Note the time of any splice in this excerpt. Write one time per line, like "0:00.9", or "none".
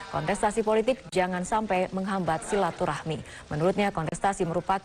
0:02.4